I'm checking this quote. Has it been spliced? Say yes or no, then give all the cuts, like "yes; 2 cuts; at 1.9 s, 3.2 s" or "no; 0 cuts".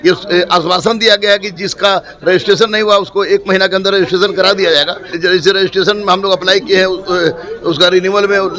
yes; 1 cut; at 5.1 s